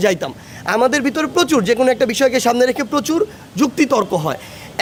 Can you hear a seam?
no; 0 cuts

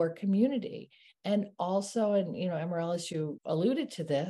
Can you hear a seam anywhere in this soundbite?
yes; 1 cut; at 3.4 s

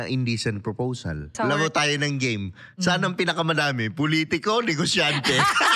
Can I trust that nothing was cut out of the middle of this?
no; 1 cut; at 1.3 s

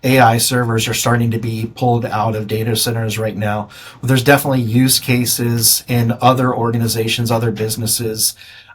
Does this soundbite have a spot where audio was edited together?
no; 0 cuts

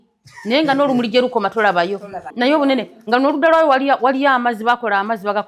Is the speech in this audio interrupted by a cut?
yes; 1 cut; at 2.2 s

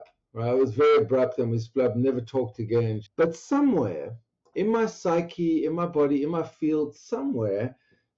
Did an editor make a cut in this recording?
yes; 1 cut; at 3.0 s

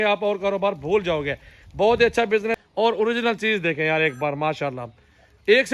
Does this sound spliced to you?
yes; 1 cut; at 2.6 s

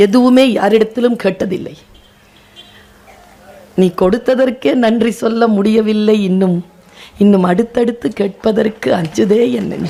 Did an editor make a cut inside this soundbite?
no; 0 cuts

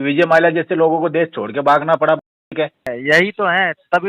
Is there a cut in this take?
yes; 1 cut; at 2.9 s

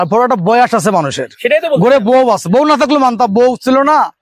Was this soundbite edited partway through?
no; 0 cuts

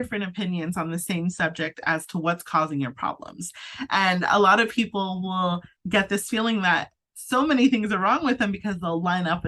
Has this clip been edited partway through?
no; 0 cuts

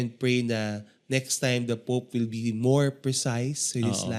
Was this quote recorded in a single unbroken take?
yes; 0 cuts

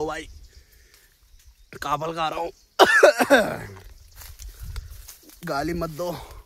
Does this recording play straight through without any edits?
yes; 0 cuts

